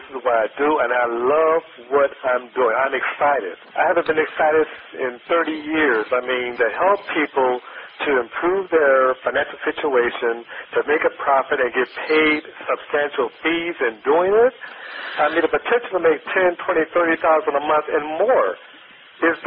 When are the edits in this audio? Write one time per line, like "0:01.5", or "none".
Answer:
0:03.6
0:04.9
0:06.5